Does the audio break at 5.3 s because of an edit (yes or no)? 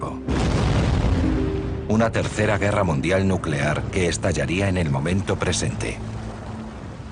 yes